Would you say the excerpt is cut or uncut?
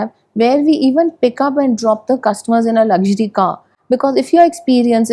uncut